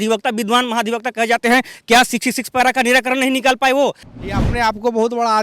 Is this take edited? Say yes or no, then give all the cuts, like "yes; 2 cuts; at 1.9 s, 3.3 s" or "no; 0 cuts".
yes; 1 cut; at 4.1 s